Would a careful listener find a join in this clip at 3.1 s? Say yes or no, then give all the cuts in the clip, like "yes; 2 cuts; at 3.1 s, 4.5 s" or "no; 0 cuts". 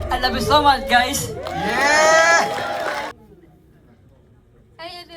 yes; 1 cut; at 3.1 s